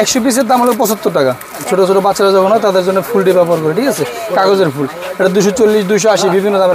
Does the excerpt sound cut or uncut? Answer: cut